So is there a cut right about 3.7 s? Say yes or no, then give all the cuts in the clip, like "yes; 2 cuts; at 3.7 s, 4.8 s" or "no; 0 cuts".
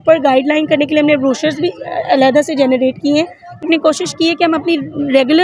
yes; 1 cut; at 3.7 s